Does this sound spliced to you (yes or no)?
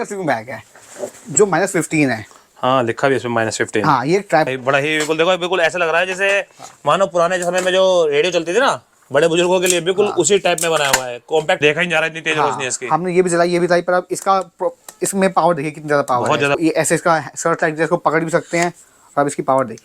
yes